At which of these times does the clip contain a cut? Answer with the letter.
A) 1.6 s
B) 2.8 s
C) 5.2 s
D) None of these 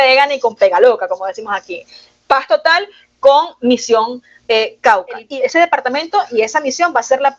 C